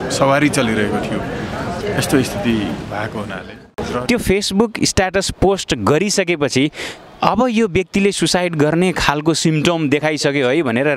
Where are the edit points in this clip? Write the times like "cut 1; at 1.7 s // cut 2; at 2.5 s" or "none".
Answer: cut 1; at 4.0 s